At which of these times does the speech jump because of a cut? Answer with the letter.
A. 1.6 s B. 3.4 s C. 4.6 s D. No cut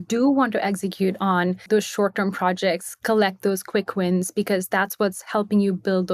A